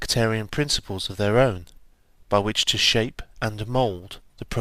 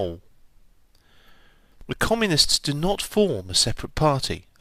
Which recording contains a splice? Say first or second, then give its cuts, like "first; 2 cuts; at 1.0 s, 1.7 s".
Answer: first; 1 cut; at 1.9 s